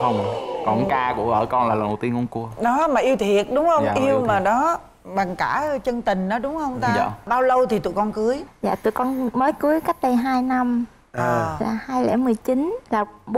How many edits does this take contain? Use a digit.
0